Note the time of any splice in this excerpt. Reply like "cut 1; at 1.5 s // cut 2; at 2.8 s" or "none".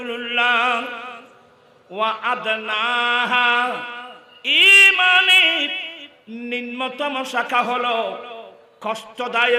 none